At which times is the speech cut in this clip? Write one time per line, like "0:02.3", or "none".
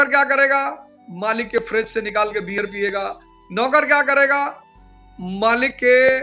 none